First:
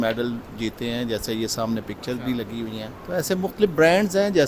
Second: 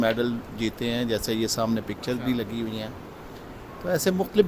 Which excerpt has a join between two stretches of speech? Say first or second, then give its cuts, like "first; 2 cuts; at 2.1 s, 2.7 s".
first; 1 cut; at 2.9 s